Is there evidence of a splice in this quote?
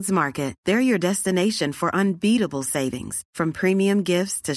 no; 0 cuts

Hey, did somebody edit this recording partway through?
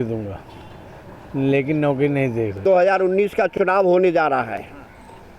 yes; 1 cut; at 2.6 s

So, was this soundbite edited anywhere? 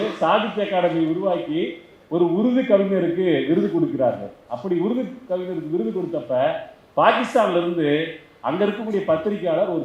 no; 0 cuts

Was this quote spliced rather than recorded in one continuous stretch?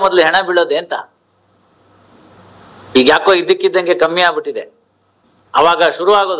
no; 0 cuts

